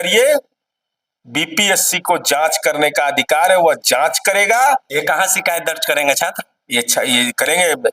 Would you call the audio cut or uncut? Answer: cut